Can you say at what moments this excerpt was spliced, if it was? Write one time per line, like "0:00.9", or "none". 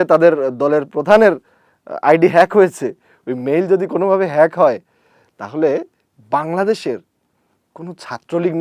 none